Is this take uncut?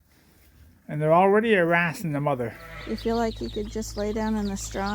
no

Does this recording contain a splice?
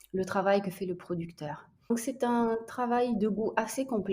yes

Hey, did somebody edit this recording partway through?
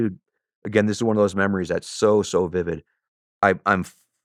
no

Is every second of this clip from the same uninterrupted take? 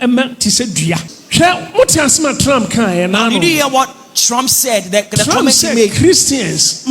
no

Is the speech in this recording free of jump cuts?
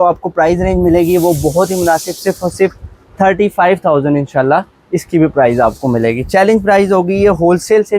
yes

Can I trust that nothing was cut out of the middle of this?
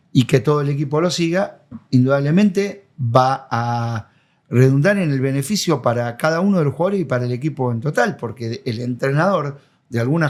yes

